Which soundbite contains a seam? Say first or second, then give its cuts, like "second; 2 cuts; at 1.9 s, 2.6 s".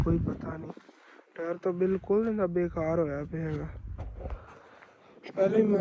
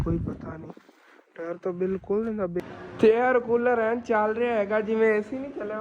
second; 1 cut; at 2.6 s